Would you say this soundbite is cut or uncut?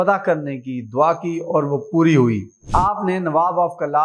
cut